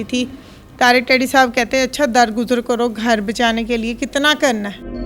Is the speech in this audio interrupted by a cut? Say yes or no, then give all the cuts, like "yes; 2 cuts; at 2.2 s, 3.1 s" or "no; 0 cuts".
no; 0 cuts